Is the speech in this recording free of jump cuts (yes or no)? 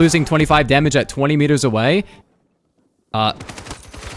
yes